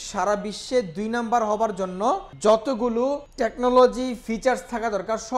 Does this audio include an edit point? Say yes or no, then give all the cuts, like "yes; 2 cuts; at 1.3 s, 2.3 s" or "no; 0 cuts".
yes; 2 cuts; at 2.3 s, 3.3 s